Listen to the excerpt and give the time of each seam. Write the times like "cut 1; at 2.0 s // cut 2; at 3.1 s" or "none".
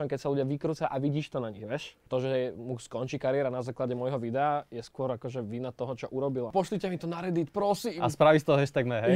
cut 1; at 2.0 s // cut 2; at 6.5 s